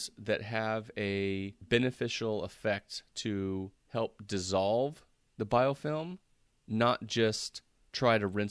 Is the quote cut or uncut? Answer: cut